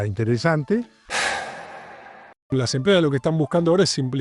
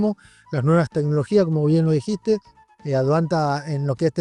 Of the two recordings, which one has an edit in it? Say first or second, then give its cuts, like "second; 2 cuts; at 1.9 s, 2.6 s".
first; 2 cuts; at 1.0 s, 2.5 s